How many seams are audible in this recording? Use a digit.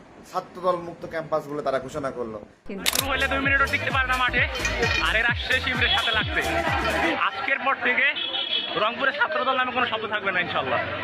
1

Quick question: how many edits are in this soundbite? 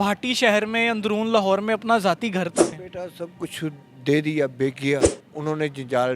2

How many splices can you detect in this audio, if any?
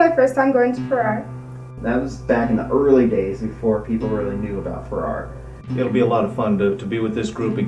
2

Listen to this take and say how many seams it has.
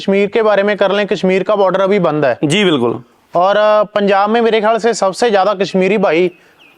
0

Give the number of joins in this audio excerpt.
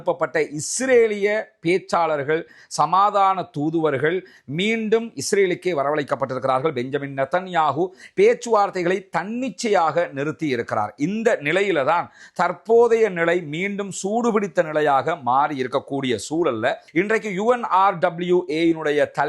1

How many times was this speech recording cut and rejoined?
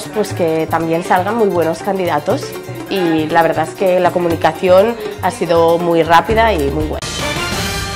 1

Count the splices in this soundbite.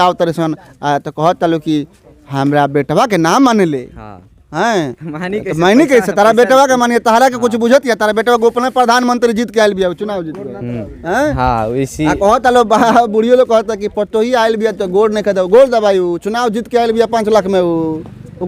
0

